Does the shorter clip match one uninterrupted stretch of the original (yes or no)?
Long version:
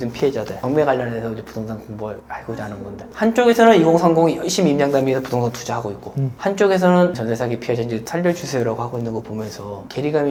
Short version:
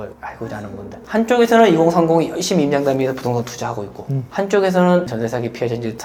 yes